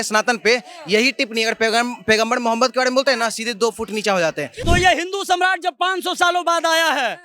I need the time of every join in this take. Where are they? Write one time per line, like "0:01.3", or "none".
0:04.5